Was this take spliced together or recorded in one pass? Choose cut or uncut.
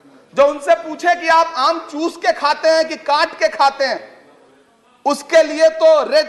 uncut